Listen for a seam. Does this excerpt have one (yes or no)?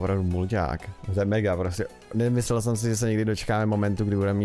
yes